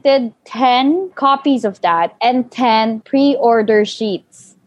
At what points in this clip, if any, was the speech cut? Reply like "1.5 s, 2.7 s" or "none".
1.1 s, 2.1 s, 3.0 s